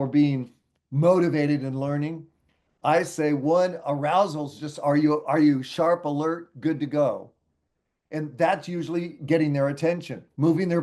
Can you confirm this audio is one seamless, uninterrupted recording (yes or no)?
yes